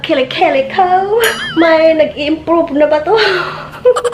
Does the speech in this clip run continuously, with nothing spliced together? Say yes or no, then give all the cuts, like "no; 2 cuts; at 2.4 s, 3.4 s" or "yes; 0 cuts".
no; 1 cut; at 1.4 s